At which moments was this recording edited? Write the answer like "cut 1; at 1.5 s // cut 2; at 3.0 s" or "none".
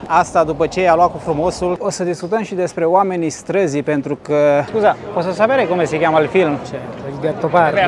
cut 1; at 1.8 s // cut 2; at 4.7 s

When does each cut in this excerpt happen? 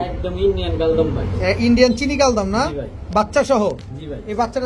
none

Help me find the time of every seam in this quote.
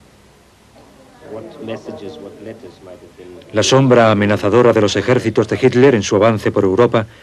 cut 1; at 1.8 s

